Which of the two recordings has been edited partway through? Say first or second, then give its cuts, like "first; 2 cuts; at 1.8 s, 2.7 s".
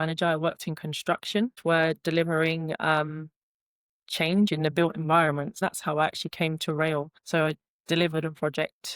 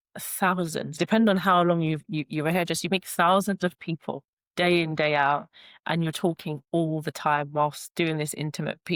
first; 3 cuts; at 1.6 s, 5.6 s, 7.2 s